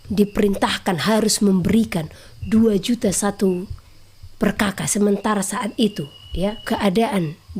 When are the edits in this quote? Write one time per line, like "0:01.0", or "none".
0:06.6

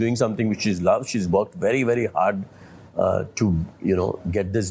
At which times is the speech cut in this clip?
none

